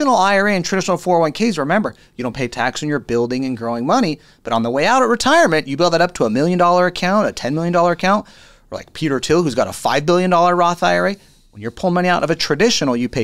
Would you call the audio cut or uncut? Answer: uncut